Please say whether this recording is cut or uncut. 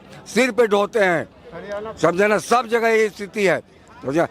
uncut